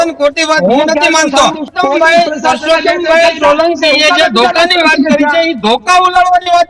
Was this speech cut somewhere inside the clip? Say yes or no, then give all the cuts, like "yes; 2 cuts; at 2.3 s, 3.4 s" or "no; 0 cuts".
yes; 1 cut; at 1.7 s